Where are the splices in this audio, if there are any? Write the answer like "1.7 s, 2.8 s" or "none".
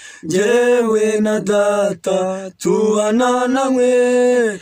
none